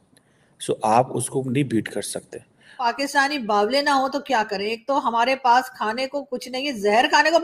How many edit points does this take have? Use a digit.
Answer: 1